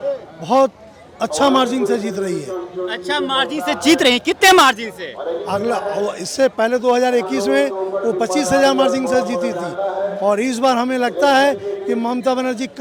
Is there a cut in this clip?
no; 0 cuts

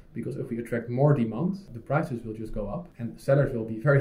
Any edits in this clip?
yes; 2 cuts; at 1.7 s, 2.9 s

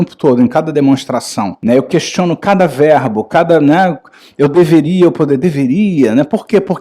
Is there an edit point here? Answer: yes; 1 cut; at 1.5 s

